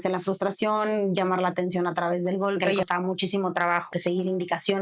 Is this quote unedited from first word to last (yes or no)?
no